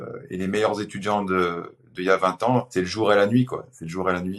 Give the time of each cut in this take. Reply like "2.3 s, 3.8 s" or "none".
2.7 s